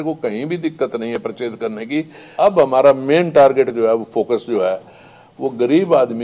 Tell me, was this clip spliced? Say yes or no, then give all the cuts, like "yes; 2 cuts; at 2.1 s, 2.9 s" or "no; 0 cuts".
yes; 1 cut; at 2.2 s